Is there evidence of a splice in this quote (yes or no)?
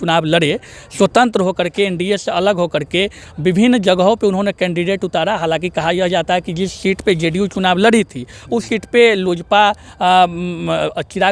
no